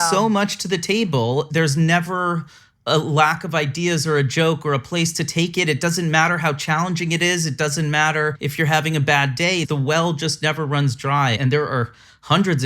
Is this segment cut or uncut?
cut